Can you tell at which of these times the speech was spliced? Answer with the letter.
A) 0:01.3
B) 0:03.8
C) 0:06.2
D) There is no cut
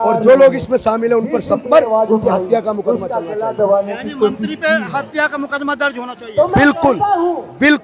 D